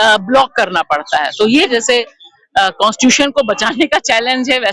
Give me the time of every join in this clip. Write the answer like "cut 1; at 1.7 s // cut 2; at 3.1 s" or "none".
cut 1; at 1.7 s